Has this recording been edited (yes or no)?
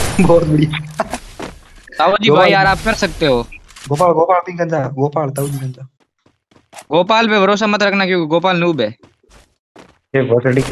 no